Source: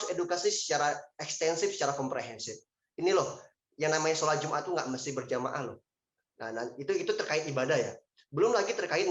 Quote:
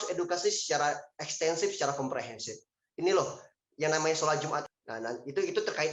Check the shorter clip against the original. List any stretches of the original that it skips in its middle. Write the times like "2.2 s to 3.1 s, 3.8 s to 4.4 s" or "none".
4.6 s to 6.2 s